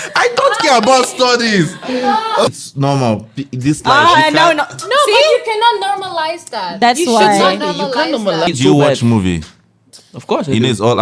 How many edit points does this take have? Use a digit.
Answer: 2